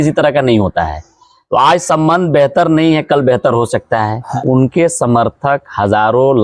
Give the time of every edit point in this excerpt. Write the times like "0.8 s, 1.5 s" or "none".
4.3 s